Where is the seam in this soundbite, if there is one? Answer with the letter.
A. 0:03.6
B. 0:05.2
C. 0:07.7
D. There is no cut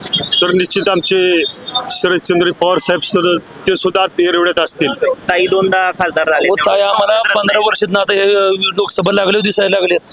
B